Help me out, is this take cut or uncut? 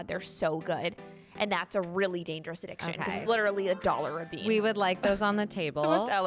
cut